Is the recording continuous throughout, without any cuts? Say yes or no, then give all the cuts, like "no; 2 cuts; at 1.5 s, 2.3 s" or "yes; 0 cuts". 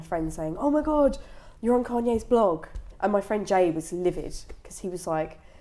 no; 1 cut; at 2.8 s